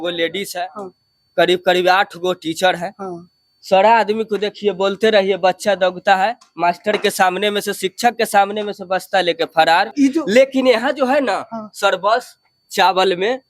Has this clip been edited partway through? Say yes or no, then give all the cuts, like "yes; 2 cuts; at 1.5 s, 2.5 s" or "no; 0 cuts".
yes; 1 cut; at 9.9 s